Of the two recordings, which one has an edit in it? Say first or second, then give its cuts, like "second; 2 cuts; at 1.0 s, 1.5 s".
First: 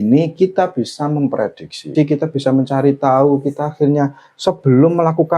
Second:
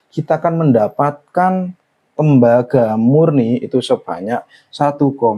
first; 1 cut; at 1.9 s